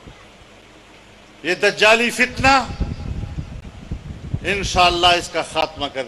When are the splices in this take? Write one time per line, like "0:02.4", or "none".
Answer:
none